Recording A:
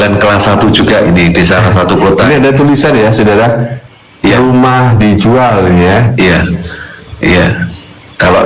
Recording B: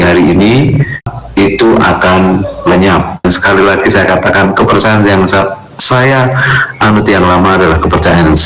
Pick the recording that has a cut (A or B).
B